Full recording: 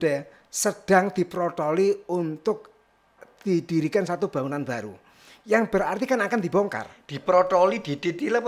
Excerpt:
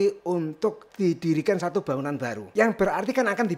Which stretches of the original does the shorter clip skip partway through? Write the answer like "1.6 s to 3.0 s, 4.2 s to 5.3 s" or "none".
2.7 s to 3.3 s, 4.8 s to 5.3 s